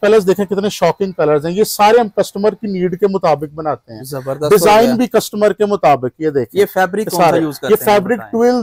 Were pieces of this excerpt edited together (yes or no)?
no